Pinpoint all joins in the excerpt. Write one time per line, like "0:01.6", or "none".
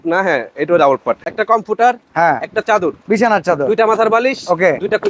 0:01.2